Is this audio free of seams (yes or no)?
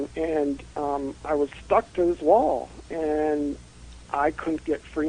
yes